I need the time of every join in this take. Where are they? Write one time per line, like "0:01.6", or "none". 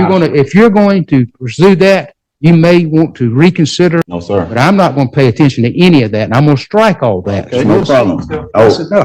0:04.2
0:07.6